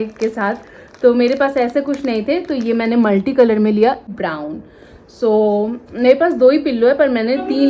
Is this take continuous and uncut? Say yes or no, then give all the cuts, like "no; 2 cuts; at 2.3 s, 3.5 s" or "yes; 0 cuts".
no; 1 cut; at 4.2 s